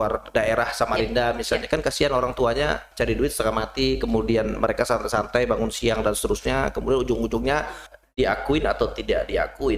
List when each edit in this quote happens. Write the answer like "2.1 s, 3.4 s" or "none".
7.8 s